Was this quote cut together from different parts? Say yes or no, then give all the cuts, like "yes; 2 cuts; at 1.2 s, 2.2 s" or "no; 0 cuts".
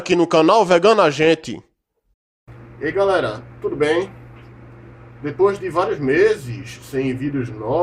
no; 0 cuts